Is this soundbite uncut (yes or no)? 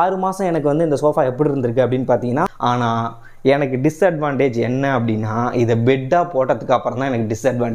no